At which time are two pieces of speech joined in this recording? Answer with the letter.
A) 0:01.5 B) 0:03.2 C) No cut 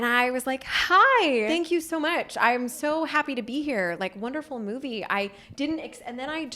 A